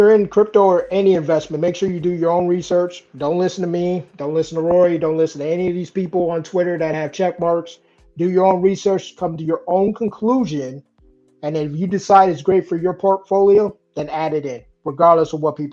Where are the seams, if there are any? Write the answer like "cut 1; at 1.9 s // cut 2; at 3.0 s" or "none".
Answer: none